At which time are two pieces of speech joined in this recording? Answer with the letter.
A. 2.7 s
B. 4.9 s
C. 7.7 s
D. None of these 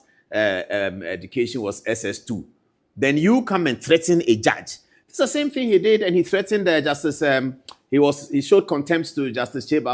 D